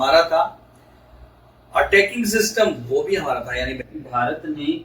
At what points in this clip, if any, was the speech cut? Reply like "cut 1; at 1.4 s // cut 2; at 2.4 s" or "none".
cut 1; at 3.8 s